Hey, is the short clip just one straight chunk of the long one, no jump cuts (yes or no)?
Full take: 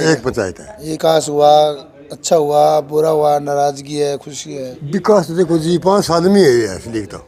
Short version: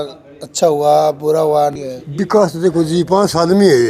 no